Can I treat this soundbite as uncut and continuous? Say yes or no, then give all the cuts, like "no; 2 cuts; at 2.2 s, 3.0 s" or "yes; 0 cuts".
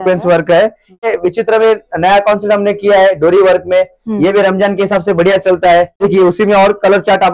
no; 2 cuts; at 1.0 s, 6.0 s